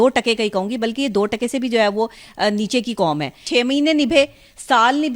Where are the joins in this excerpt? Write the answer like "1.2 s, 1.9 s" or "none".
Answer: 3.4 s